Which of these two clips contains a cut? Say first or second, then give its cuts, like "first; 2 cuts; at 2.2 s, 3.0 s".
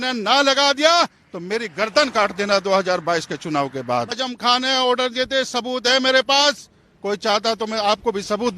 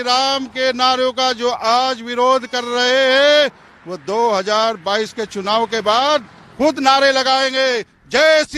first; 1 cut; at 4.2 s